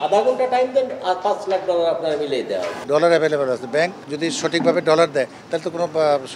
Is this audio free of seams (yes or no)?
no